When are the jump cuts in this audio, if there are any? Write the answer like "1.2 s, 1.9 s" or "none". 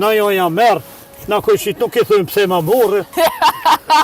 3.1 s